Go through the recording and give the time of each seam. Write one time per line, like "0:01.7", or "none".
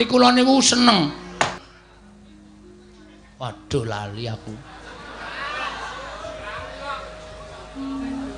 0:01.5